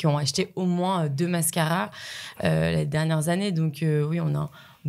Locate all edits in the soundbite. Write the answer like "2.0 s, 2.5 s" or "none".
none